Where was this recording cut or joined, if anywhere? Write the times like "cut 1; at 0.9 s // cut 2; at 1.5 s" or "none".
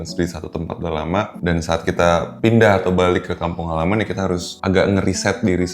cut 1; at 1.3 s // cut 2; at 2.3 s // cut 3; at 4.5 s